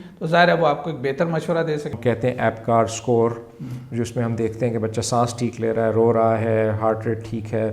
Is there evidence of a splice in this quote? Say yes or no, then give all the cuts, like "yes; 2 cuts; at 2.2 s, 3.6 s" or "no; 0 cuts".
yes; 1 cut; at 1.9 s